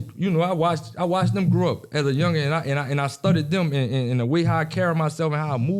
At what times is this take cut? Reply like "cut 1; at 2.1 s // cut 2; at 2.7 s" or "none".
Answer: none